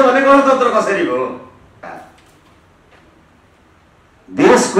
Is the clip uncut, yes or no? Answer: no